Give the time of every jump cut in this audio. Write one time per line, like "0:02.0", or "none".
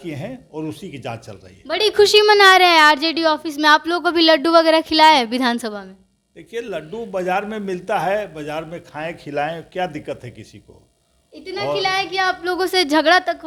none